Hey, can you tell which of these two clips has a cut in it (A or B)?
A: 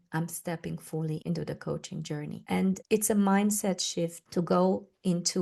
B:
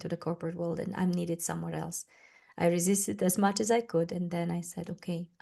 A